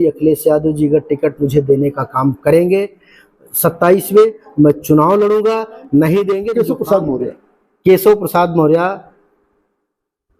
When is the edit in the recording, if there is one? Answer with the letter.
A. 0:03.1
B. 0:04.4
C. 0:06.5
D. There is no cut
C